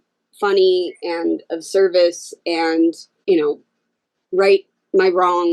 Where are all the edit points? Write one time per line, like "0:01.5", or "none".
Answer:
0:03.1